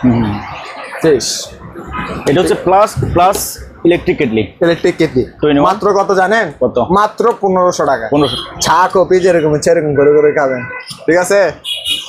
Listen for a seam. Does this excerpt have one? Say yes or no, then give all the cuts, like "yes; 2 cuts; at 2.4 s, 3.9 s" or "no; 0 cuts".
yes; 1 cut; at 8.3 s